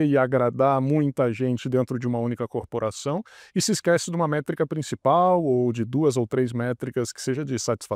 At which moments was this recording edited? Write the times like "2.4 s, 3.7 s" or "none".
none